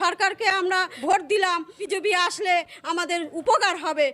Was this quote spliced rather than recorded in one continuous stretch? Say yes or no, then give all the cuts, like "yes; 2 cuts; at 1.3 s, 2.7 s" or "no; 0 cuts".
yes; 2 cuts; at 0.9 s, 1.8 s